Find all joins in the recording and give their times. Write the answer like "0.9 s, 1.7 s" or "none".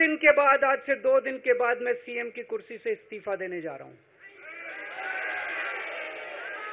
none